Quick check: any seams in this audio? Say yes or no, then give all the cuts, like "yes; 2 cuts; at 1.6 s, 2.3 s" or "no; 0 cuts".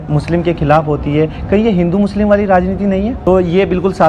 yes; 1 cut; at 3.2 s